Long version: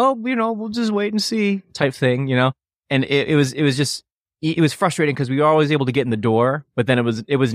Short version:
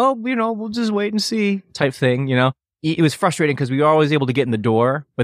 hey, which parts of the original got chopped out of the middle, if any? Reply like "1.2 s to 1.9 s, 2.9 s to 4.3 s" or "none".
2.7 s to 4.3 s